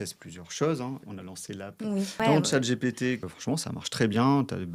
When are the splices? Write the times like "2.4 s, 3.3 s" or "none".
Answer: 1.1 s, 2.2 s, 3.3 s